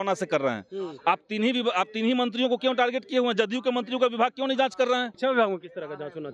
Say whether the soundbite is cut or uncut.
cut